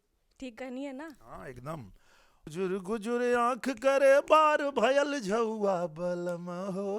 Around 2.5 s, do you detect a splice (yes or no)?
yes